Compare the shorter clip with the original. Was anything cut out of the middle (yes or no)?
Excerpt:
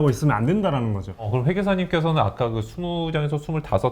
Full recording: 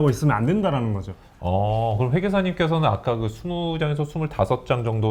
yes